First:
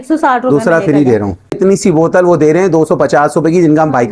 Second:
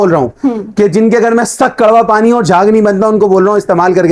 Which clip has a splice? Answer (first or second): first